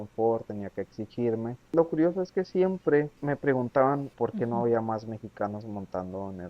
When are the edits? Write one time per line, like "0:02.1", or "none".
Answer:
0:01.7
0:03.2
0:04.1